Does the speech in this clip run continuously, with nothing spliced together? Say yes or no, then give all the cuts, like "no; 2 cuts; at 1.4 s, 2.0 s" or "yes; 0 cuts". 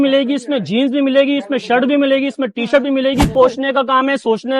no; 1 cut; at 3.3 s